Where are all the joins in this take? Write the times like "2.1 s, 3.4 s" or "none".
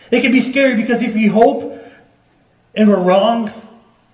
none